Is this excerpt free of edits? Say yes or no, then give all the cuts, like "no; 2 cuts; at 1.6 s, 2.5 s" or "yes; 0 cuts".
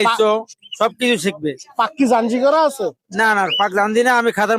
yes; 0 cuts